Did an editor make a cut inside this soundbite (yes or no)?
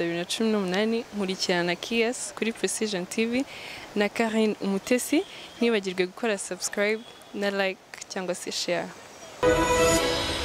yes